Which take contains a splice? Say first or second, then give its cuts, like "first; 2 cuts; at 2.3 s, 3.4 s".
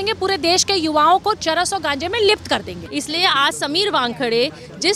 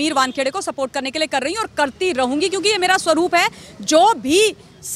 first; 1 cut; at 2.8 s